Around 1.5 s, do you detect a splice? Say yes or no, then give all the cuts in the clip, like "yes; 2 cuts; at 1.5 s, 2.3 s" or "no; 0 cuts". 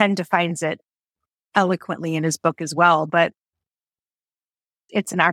yes; 1 cut; at 1.5 s